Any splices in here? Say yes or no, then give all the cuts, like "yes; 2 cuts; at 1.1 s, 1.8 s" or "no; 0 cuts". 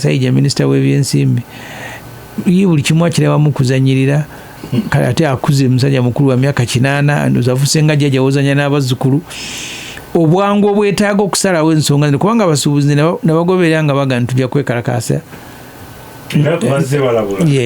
no; 0 cuts